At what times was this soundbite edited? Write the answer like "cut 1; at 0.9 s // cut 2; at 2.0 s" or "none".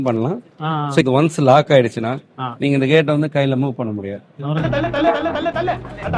cut 1; at 1.0 s // cut 2; at 4.2 s